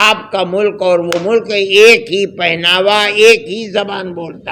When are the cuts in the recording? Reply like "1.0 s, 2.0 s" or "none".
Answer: none